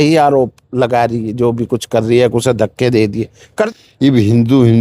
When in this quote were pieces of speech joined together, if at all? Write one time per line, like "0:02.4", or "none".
0:03.7